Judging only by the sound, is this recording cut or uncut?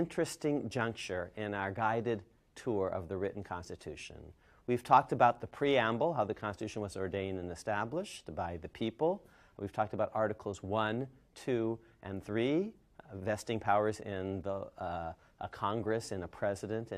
uncut